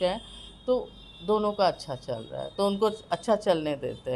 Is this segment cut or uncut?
uncut